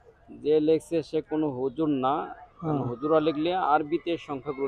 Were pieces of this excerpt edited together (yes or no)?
no